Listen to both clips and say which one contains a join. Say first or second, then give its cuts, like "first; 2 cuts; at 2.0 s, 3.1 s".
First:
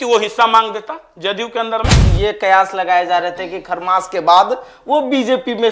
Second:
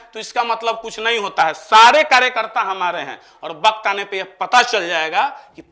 first; 1 cut; at 2.0 s